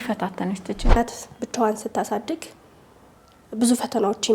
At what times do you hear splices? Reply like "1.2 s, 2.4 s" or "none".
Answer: 1.0 s